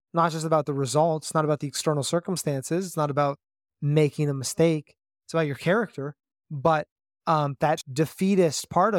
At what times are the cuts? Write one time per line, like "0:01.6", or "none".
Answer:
0:07.9